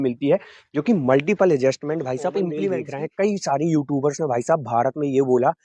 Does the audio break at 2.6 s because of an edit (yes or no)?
yes